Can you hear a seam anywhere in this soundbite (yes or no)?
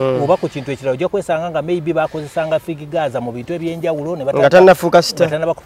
no